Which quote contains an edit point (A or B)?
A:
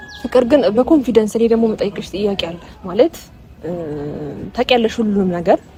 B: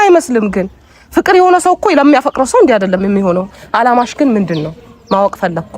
B